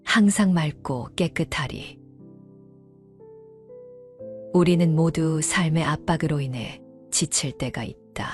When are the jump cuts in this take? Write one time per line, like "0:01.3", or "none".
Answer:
0:02.2
0:03.9